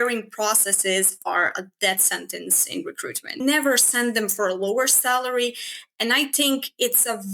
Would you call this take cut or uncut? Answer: cut